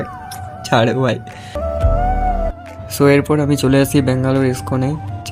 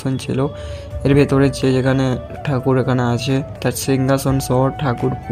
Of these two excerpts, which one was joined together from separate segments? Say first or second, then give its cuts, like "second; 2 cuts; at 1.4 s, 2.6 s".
first; 1 cut; at 1.6 s